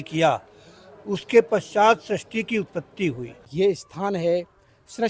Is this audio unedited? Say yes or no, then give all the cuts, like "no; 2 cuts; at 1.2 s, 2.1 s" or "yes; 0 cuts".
no; 1 cut; at 3.4 s